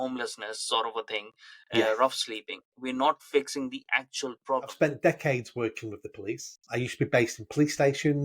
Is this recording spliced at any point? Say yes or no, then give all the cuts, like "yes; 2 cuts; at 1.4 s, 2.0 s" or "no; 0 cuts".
yes; 1 cut; at 4.7 s